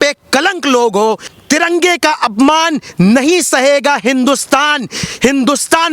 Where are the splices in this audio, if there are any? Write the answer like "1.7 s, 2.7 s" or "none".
1.3 s